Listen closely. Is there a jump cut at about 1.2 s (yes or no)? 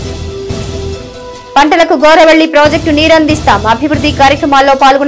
no